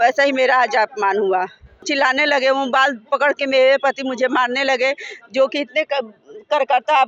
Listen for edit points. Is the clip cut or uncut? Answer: cut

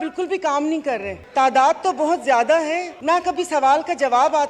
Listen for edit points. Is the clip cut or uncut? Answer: cut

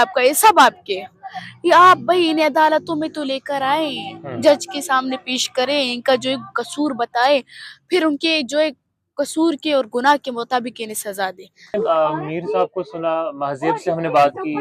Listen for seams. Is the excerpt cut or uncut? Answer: uncut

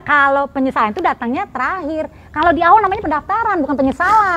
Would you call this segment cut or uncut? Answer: uncut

